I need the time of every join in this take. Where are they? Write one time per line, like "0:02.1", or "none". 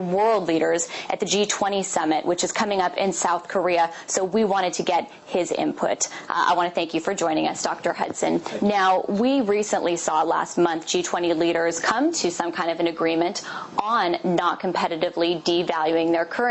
none

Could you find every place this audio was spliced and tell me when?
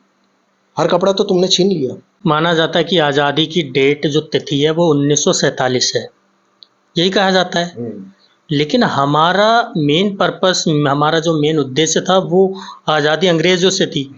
0:02.1

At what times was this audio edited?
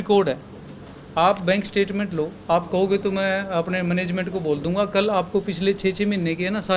none

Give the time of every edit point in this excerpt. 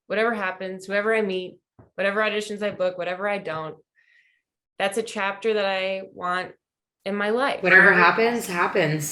none

